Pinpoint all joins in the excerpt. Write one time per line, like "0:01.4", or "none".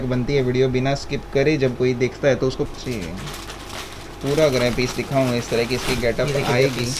0:02.7